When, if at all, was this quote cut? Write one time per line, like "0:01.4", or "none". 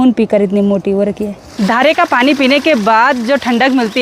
0:01.4